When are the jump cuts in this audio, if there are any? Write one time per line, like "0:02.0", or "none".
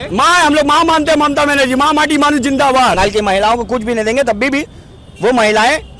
0:03.0